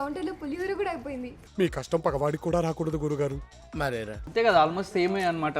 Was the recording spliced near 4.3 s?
yes; 1 cut; at 4.3 s

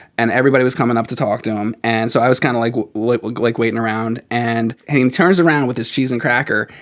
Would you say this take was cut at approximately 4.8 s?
yes; 1 cut; at 4.8 s

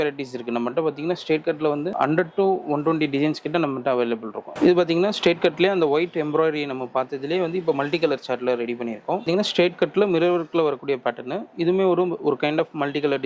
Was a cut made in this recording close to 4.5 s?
yes; 2 cuts; at 4.5 s, 9.3 s

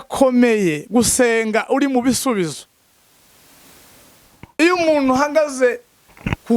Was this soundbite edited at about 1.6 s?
no; 1 cut; at 4.5 s

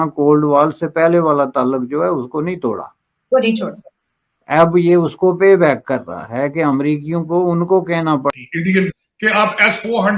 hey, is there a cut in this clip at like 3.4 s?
no; 1 cut; at 8.3 s

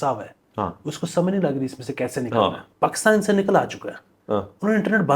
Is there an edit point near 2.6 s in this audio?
yes; 1 cut; at 2.6 s

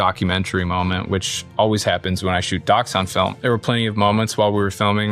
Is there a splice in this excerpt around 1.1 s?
no; 1 cut; at 3.4 s

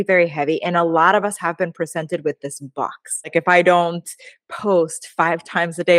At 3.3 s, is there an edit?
yes; 1 cut; at 3.3 s

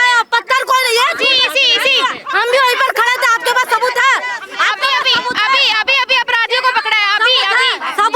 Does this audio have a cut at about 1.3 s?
no; 0 cuts

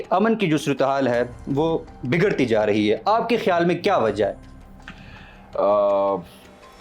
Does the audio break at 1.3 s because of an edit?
no; 0 cuts

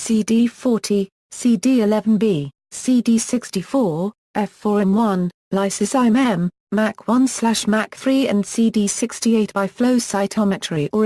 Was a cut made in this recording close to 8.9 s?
no; 1 cut; at 6.3 s

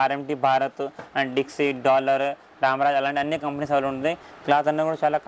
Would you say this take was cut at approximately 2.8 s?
no; 1 cut; at 4.3 s

